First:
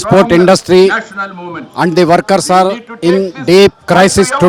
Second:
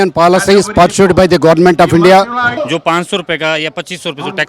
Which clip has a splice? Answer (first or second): second